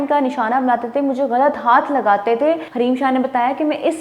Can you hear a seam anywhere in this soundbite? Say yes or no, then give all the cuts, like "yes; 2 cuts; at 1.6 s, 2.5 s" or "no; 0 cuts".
yes; 1 cut; at 2.7 s